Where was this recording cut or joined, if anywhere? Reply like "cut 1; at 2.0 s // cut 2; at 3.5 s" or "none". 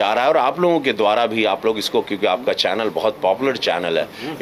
none